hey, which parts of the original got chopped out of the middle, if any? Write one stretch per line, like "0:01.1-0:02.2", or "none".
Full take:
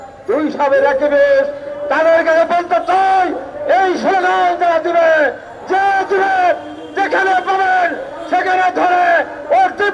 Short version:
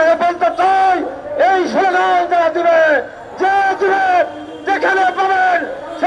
none